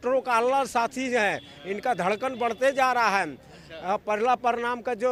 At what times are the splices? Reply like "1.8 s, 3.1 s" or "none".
none